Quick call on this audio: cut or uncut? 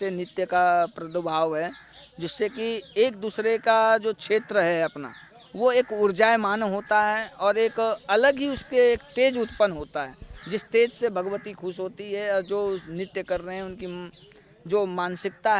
uncut